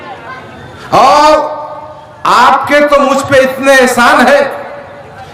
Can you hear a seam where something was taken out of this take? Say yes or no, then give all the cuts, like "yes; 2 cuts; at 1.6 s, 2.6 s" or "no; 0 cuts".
no; 0 cuts